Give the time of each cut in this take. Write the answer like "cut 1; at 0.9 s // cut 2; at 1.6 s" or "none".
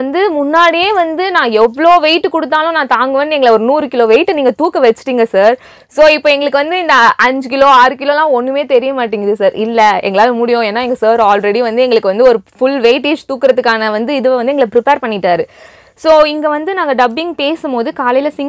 none